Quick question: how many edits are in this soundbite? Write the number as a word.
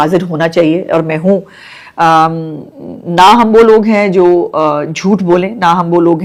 zero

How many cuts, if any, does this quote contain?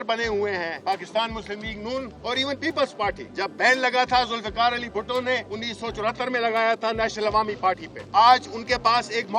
five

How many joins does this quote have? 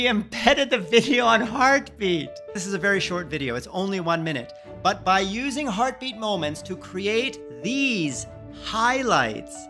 one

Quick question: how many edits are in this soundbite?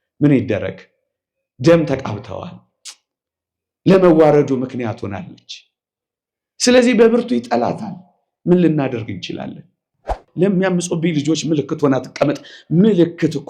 one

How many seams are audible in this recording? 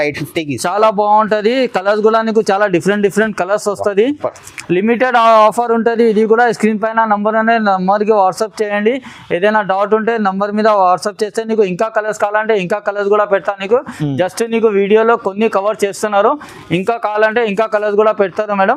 zero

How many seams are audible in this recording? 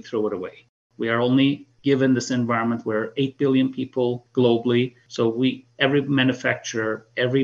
three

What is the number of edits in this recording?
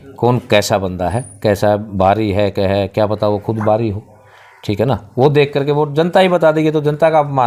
zero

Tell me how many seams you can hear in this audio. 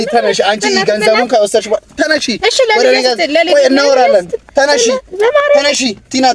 zero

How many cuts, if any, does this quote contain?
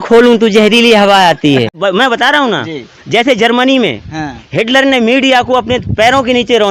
one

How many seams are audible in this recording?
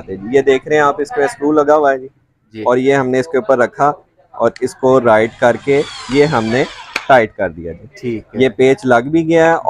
zero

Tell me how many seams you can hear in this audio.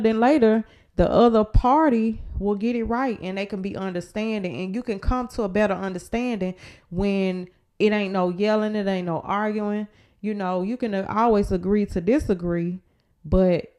zero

